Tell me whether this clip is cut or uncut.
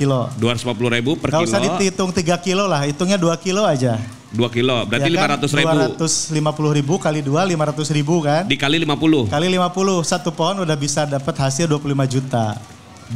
uncut